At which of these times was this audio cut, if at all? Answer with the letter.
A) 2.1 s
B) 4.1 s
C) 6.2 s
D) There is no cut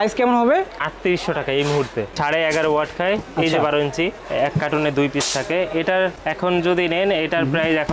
A